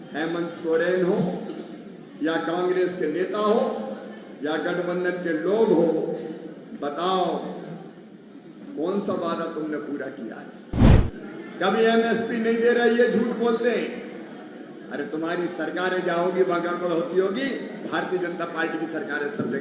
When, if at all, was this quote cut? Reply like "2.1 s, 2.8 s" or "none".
10.8 s